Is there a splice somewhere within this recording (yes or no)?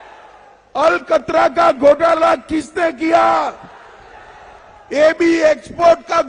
no